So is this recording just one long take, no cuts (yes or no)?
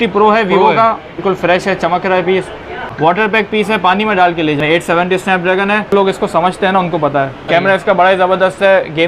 no